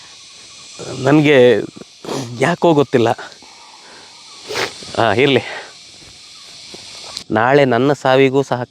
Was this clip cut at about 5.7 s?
no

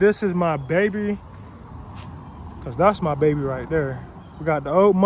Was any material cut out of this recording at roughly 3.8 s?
no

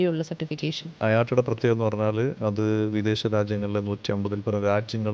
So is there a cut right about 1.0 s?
yes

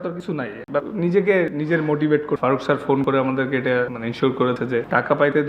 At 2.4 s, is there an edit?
yes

